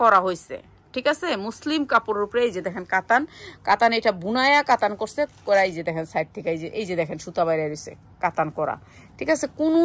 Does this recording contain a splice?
no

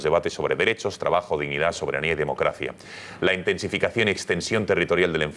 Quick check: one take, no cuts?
no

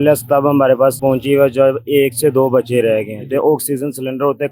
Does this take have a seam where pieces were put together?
yes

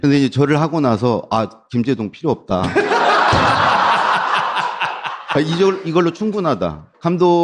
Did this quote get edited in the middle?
no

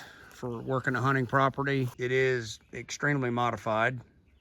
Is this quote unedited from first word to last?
no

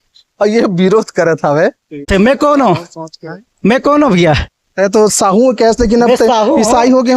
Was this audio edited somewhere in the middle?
yes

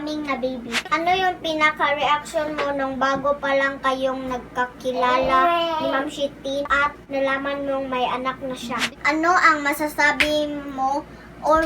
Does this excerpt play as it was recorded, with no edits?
no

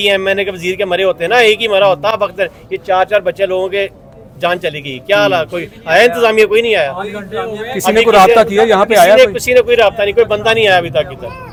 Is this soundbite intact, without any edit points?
yes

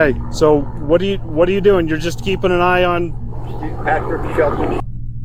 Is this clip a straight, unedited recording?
yes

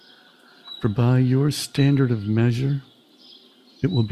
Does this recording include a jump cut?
no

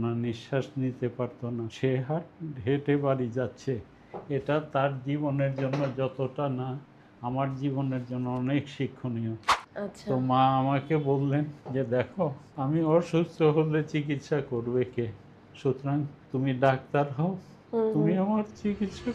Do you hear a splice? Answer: yes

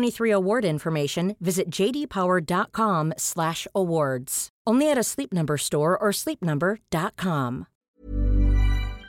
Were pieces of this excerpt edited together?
yes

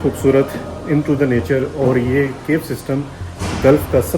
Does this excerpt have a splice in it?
no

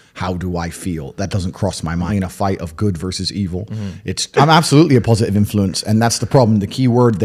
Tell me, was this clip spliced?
yes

